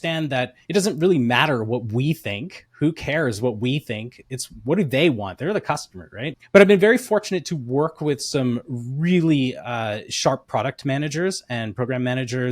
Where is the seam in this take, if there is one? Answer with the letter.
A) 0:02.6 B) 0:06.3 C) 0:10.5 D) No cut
B